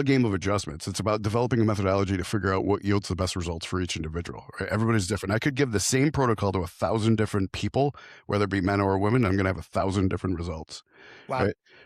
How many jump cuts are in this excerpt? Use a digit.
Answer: 0